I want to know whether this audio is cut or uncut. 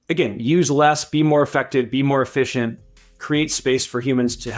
uncut